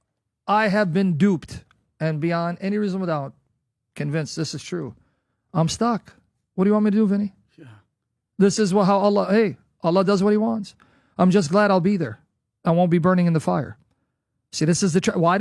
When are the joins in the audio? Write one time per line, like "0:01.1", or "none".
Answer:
none